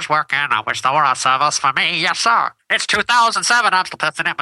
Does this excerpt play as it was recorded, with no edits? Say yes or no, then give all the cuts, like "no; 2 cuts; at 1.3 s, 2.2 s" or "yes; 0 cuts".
no; 1 cut; at 2.9 s